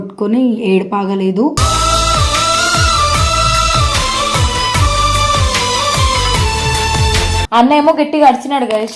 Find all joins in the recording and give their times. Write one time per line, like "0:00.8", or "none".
0:07.4